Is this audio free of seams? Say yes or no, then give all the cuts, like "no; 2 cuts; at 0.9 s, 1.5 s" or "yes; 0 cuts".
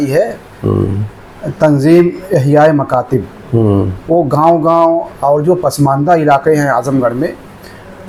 yes; 0 cuts